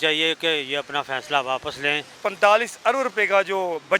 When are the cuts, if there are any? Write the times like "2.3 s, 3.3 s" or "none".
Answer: 2.2 s